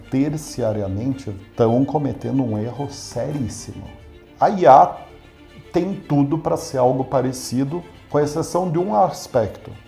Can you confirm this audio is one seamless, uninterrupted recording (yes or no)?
no